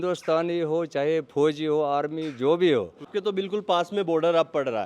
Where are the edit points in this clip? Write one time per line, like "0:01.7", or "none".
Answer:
0:03.1